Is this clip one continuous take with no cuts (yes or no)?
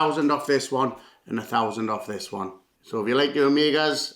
yes